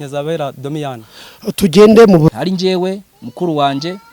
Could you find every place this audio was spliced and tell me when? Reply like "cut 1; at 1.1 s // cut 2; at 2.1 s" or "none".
cut 1; at 2.3 s